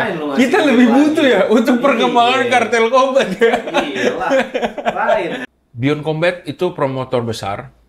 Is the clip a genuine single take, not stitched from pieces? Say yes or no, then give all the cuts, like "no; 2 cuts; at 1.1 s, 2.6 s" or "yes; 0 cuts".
no; 1 cut; at 5.5 s